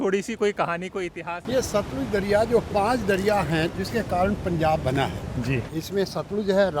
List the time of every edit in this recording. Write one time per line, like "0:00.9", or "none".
0:01.4
0:03.7
0:05.7